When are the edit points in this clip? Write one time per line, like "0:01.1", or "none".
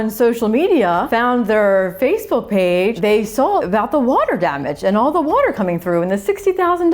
0:01.1
0:03.2